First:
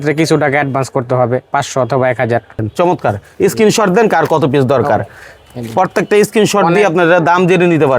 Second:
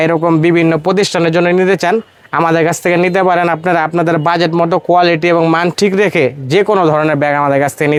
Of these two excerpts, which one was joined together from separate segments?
first; 1 cut; at 2.6 s

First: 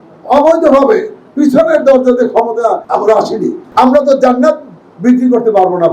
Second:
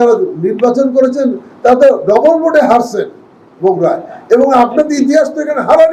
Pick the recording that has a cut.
first; 2 cuts; at 2.8 s, 3.6 s

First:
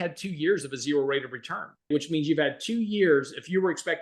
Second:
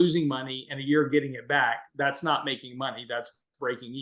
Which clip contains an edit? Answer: first; 1 cut; at 1.9 s

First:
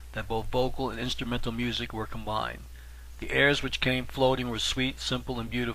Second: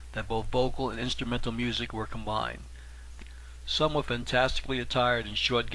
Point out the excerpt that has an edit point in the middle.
first; 1 cut; at 3.1 s

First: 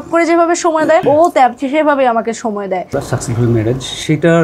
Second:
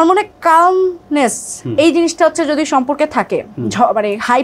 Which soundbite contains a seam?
first; 2 cuts; at 1.0 s, 2.9 s

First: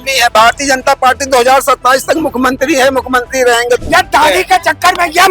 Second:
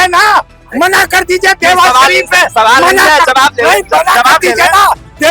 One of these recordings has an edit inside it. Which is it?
first; 1 cut; at 3.8 s

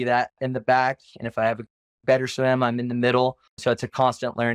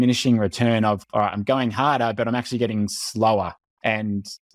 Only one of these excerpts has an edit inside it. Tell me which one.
first; 1 cut; at 3.5 s

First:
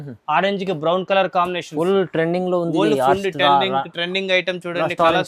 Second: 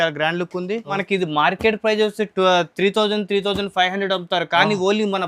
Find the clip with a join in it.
second; 1 cut; at 1.0 s

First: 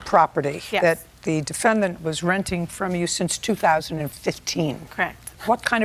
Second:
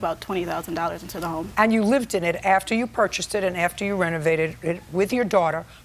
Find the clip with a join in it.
second; 1 cut; at 1.5 s

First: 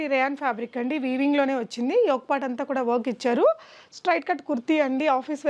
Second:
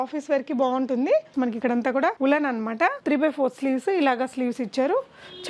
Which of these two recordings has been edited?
second; 1 cut; at 1.3 s

